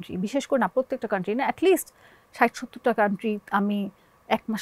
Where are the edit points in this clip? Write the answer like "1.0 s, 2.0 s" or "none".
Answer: none